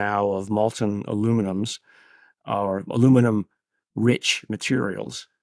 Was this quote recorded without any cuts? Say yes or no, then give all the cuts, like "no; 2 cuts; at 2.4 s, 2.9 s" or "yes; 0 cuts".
yes; 0 cuts